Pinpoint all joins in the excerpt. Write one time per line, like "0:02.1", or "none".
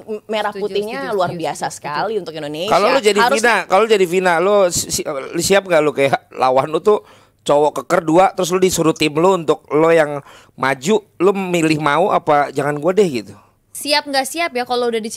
none